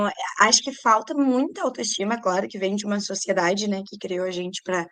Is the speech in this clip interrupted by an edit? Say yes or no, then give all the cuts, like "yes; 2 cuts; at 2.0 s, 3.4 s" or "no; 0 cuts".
no; 0 cuts